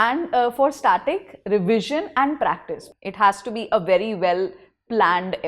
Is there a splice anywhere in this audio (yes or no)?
yes